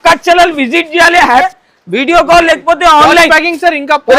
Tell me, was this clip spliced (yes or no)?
yes